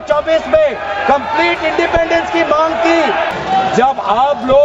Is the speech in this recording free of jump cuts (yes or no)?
no